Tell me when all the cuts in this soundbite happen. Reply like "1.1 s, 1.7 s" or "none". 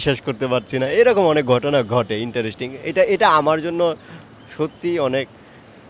none